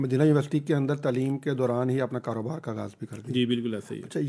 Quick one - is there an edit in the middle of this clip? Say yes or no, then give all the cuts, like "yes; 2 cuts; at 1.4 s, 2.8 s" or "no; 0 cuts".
no; 0 cuts